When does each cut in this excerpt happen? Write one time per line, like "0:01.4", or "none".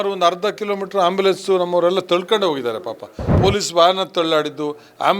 0:03.3

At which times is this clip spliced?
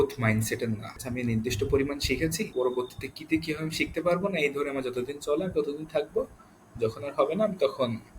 0:01.0
0:02.5

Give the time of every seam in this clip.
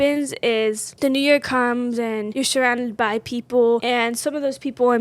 0:00.9
0:02.3
0:03.8

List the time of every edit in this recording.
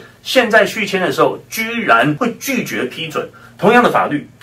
0:02.2

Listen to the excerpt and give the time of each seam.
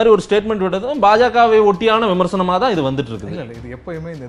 none

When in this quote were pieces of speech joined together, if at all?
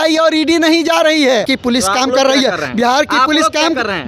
0:01.5

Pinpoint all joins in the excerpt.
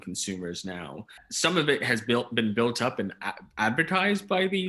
0:01.2

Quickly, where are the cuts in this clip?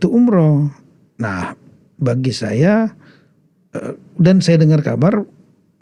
none

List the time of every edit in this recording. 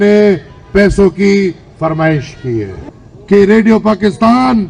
0:02.8

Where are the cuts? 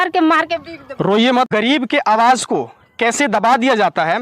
0:01.5

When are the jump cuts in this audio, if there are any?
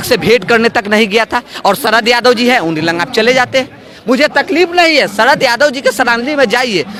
none

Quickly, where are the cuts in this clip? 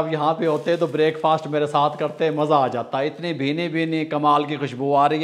none

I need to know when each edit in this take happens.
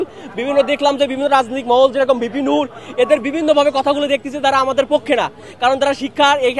none

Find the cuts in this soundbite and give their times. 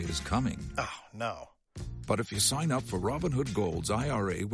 none

